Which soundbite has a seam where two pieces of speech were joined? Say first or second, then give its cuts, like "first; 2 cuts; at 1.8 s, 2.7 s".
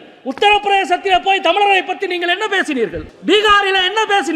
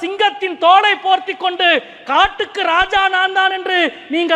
first; 1 cut; at 3.1 s